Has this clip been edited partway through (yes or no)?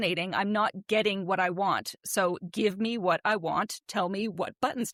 no